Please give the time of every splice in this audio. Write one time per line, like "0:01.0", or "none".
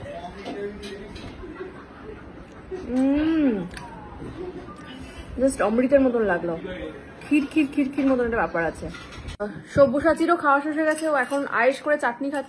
0:09.5